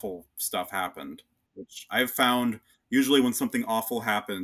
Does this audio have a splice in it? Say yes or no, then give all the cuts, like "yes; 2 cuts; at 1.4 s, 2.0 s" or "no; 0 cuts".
yes; 1 cut; at 1.5 s